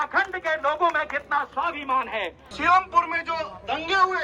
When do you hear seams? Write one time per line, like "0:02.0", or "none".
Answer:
0:02.6